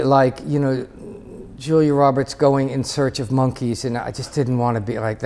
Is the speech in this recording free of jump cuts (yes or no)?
yes